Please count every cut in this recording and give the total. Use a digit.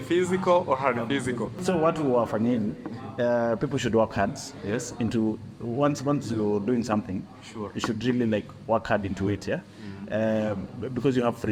0